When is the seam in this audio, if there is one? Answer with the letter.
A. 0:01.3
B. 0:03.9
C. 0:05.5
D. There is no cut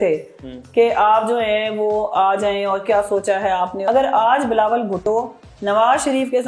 B